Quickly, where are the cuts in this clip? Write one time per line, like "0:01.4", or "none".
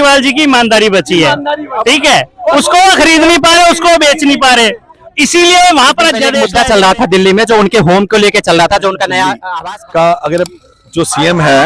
0:06.4
0:09.5

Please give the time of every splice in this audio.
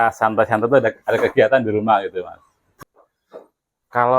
0:02.6

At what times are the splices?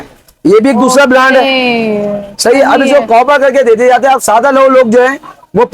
none

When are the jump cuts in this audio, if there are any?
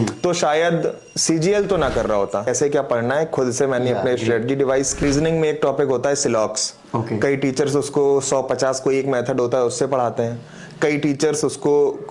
0:02.5
0:05.0

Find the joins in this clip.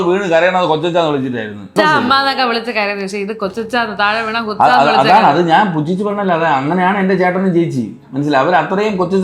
0:01.6

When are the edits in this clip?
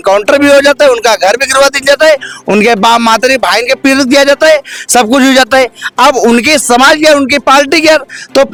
none

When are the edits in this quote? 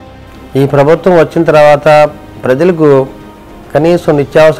0:02.3

